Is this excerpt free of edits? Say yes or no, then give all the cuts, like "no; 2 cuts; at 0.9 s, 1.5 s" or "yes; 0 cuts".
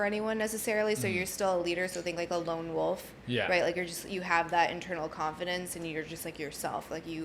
yes; 0 cuts